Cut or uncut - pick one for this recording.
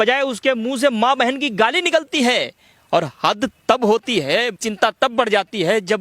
cut